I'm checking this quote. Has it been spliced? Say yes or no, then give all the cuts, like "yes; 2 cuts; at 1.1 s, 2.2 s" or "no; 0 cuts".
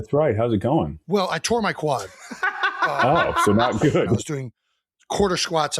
yes; 2 cuts; at 1.0 s, 4.2 s